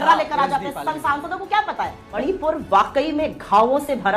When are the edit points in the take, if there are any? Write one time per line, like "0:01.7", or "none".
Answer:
0:02.1